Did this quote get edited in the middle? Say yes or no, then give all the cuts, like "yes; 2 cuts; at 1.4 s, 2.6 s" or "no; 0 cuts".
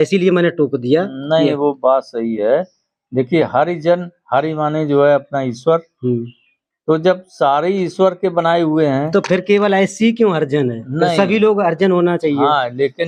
no; 0 cuts